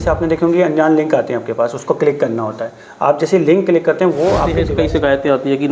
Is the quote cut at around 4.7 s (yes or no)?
yes